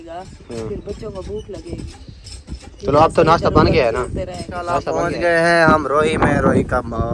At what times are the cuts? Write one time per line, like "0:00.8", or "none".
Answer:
0:04.9

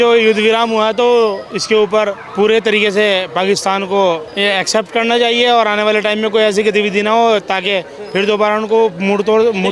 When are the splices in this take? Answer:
none

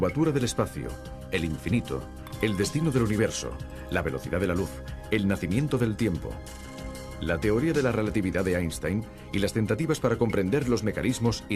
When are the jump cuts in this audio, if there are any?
0:02.7

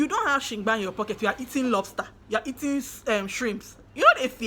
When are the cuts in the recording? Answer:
none

